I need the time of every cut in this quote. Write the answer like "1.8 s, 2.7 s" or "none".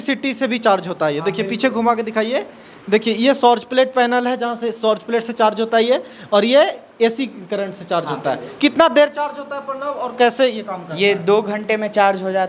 none